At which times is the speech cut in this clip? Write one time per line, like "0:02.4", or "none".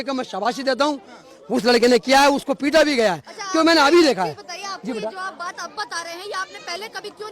none